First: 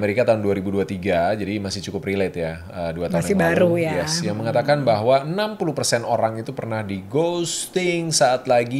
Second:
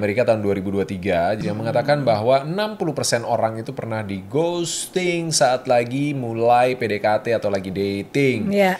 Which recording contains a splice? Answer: second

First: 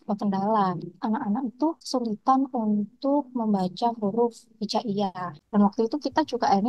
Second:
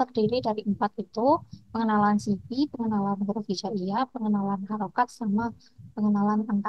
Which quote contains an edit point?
first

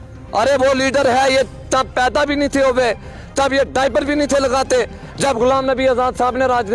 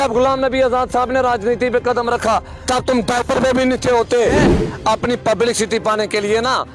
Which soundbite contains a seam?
second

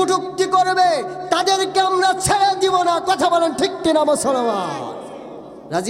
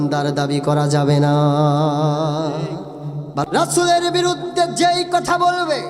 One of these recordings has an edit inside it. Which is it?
second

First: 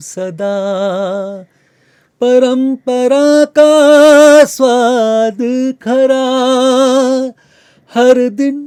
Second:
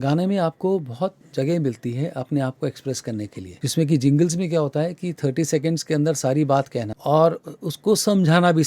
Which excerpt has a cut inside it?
second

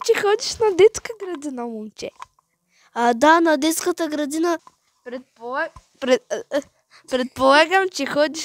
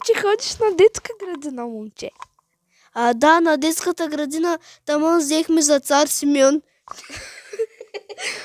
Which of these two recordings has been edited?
first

